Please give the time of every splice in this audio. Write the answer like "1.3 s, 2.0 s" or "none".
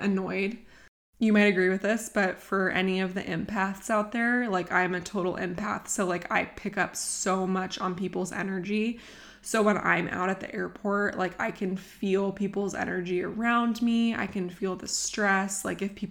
none